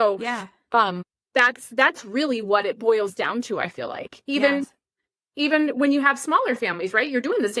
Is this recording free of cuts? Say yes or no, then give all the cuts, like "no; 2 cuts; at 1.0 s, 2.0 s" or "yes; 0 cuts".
no; 1 cut; at 1.1 s